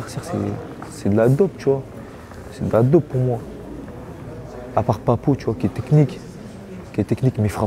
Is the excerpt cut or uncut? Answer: uncut